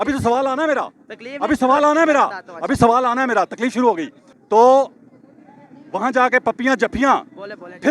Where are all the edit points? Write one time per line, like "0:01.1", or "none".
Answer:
none